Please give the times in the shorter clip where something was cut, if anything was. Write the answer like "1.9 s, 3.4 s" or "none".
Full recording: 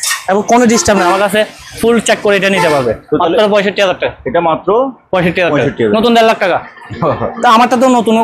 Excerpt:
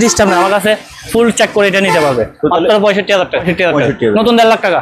3.5 s